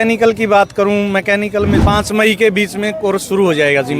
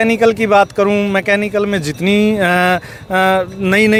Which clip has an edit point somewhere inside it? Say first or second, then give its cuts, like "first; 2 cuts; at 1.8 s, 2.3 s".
first; 1 cut; at 1.8 s